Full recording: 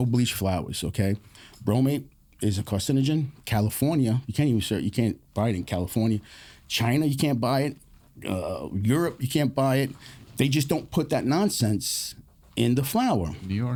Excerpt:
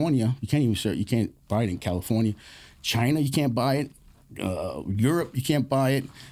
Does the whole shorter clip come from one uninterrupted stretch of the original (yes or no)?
yes